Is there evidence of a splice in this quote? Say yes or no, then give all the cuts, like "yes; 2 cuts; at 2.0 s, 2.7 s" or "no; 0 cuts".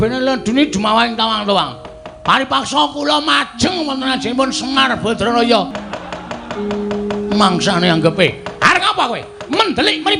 yes; 1 cut; at 5.7 s